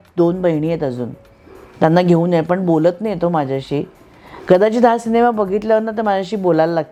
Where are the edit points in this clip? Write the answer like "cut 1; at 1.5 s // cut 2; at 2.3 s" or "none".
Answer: none